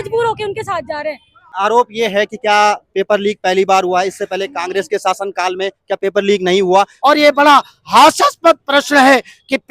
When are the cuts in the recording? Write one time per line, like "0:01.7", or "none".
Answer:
0:01.5
0:06.9